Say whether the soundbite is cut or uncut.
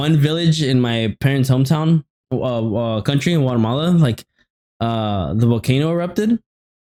uncut